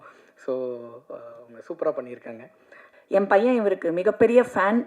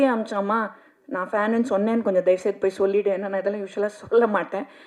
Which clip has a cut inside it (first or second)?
first